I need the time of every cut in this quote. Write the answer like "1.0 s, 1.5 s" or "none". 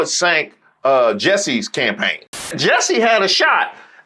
2.5 s